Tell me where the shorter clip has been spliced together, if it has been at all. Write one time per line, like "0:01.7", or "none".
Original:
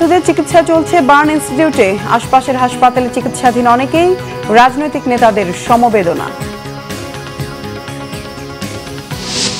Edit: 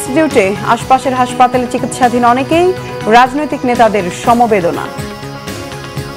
none